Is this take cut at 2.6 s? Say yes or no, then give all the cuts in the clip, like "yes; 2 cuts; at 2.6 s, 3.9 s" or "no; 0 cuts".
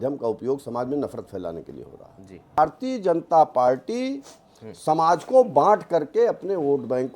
yes; 1 cut; at 2.6 s